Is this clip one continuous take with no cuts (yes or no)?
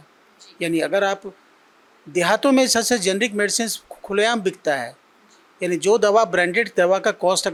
yes